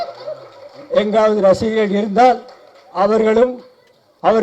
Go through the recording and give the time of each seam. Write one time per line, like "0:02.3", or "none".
none